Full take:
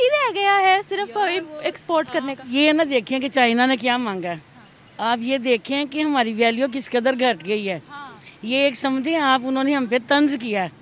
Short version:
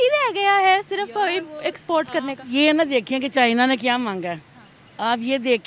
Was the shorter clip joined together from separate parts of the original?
no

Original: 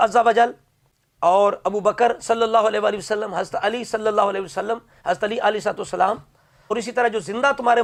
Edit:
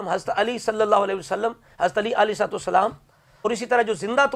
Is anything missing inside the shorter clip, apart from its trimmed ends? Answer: no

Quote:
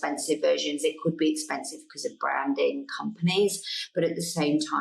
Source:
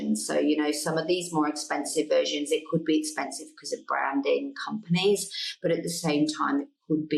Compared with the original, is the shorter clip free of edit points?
yes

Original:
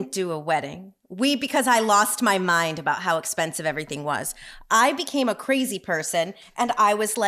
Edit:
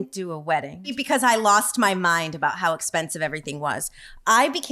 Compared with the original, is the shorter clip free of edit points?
no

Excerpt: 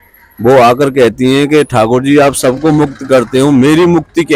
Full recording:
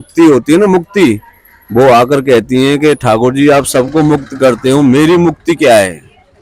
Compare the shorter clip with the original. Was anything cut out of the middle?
no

